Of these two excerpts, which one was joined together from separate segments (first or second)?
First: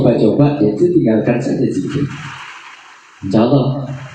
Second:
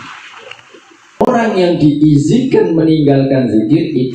second